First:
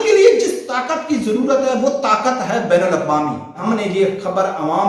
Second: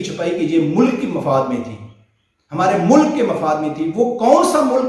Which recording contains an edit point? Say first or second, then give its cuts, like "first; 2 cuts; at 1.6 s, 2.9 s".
first; 1 cut; at 3.6 s